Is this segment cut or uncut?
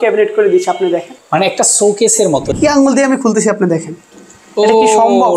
cut